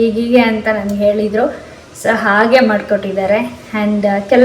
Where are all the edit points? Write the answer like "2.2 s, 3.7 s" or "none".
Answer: none